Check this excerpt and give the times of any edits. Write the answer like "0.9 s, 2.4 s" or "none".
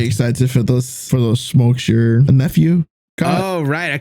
1.0 s, 2.2 s